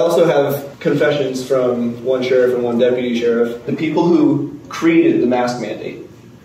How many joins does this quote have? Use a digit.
1